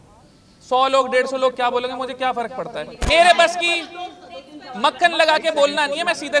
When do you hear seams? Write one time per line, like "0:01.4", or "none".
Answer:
0:03.0